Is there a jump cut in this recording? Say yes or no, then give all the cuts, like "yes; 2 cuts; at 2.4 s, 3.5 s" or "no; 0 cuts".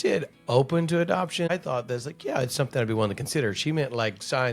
yes; 1 cut; at 1.5 s